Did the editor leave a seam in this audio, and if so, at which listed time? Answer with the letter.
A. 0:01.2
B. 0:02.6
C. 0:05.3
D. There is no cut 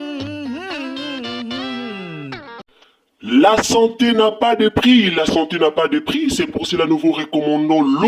B